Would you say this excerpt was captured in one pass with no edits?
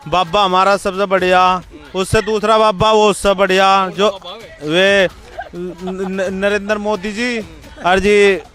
yes; 0 cuts

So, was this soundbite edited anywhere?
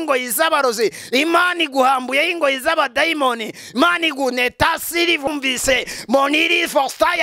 yes; 1 cut; at 5.3 s

